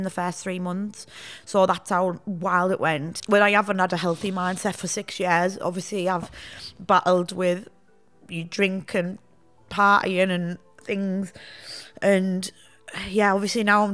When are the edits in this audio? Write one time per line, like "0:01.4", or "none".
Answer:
0:03.2